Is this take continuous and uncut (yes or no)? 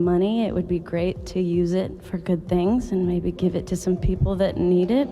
no